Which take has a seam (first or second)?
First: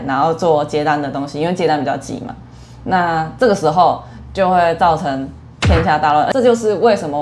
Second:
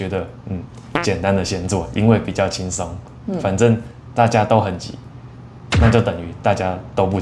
first